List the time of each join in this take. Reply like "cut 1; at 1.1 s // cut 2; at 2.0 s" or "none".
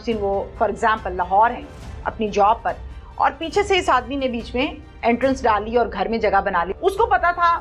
cut 1; at 6.7 s